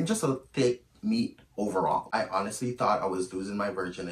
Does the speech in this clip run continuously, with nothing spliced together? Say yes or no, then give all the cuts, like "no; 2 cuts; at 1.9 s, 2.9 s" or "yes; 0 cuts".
no; 1 cut; at 2.1 s